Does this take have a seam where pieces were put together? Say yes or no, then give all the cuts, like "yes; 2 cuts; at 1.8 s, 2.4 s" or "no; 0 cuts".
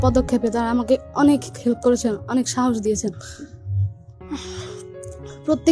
no; 0 cuts